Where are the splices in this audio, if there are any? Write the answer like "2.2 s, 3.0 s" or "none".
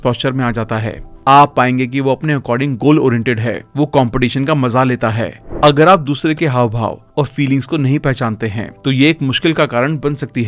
5.4 s